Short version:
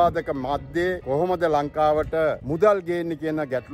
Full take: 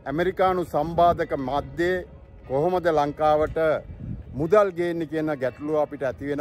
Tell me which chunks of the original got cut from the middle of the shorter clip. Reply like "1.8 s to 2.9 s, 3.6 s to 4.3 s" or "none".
2.0 s to 2.4 s, 3.9 s to 4.4 s